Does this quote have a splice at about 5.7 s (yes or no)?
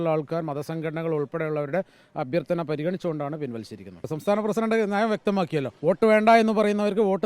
yes